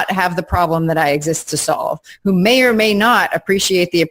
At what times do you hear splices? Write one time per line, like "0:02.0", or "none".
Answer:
none